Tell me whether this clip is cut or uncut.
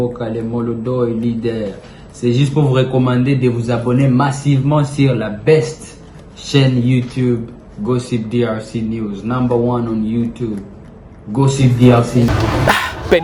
cut